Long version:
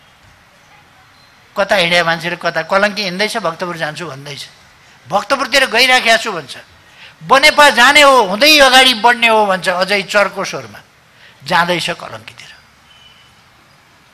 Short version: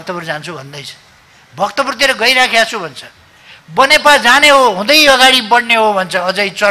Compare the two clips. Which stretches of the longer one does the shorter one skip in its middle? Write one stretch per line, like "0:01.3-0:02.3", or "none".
none